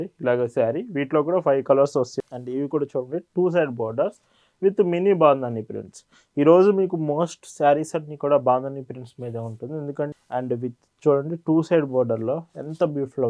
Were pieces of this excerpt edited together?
yes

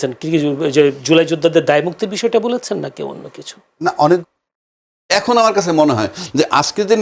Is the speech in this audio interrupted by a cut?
yes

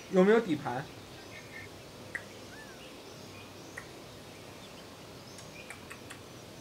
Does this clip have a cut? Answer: yes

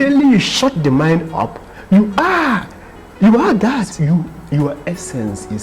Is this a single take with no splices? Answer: no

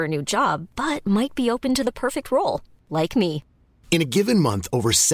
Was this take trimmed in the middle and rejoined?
no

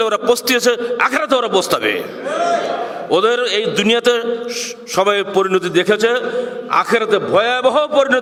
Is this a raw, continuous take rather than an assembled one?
yes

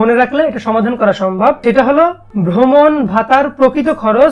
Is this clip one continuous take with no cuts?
no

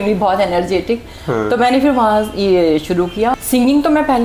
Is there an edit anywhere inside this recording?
yes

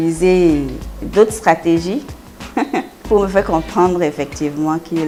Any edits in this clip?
no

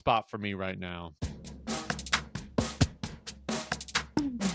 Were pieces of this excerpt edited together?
yes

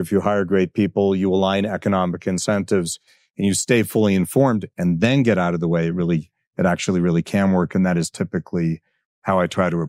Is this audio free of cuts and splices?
yes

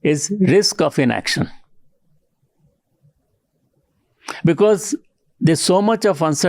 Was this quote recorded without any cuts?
yes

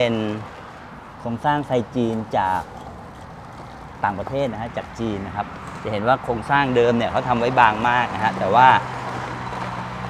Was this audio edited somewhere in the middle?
no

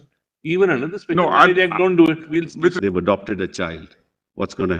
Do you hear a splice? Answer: yes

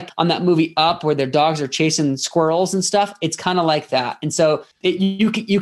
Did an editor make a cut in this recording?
yes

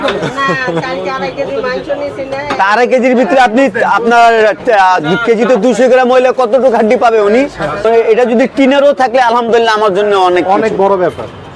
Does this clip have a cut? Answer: yes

